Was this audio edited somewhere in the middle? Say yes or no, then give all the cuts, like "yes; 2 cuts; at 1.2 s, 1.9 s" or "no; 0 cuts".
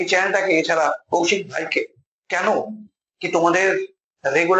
no; 0 cuts